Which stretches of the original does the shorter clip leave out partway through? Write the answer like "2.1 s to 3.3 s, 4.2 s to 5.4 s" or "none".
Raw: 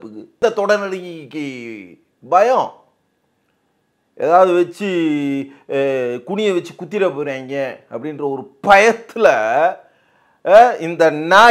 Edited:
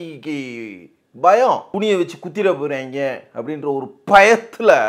2.8 s to 6.2 s